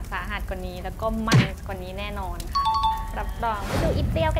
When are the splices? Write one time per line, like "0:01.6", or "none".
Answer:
none